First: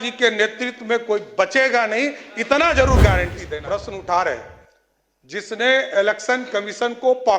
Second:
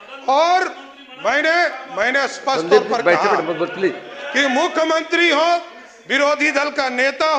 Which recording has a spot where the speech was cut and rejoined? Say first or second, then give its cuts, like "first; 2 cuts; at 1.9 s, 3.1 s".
first; 1 cut; at 3.4 s